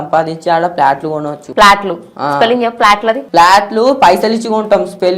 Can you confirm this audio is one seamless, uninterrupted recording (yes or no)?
no